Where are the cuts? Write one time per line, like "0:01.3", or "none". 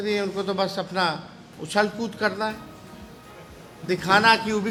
none